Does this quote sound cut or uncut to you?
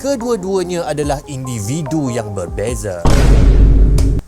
cut